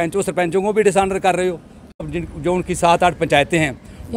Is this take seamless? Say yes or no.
no